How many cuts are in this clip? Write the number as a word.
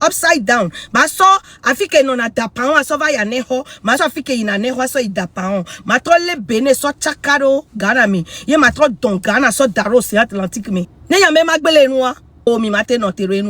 one